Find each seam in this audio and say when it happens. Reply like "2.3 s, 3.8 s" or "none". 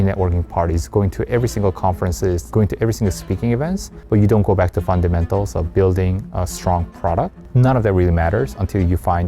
2.5 s, 3.9 s, 7.4 s